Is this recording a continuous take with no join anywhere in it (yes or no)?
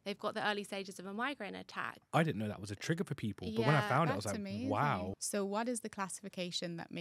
no